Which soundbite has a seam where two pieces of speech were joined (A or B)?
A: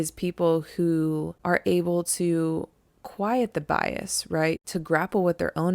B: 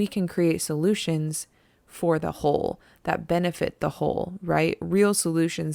A